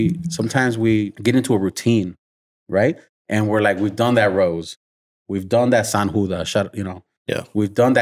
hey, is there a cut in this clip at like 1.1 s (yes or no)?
yes